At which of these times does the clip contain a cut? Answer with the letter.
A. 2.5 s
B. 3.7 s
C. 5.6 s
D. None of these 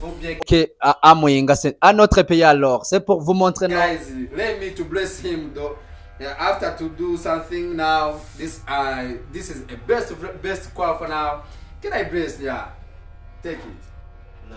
B